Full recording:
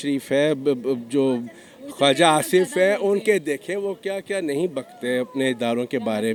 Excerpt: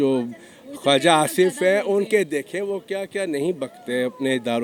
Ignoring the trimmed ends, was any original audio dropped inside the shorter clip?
no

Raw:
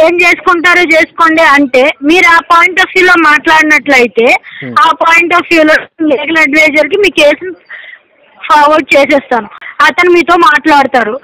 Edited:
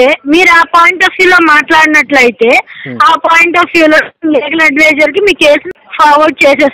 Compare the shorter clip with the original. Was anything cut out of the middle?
yes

